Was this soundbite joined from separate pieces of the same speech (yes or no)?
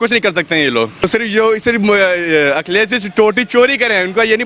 yes